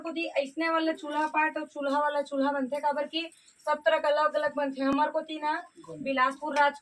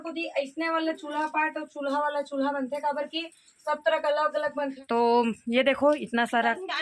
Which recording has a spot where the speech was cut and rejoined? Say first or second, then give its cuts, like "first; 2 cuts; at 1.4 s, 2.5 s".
second; 1 cut; at 4.7 s